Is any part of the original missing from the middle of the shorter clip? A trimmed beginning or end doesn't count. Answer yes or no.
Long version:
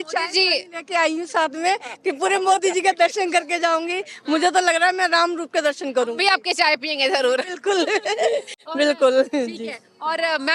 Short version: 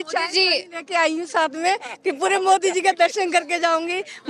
no